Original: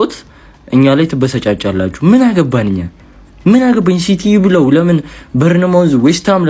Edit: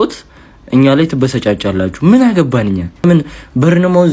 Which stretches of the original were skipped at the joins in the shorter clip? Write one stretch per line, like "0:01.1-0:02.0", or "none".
0:03.0-0:04.8